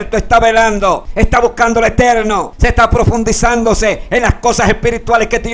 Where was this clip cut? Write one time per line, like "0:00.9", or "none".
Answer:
0:01.1
0:02.5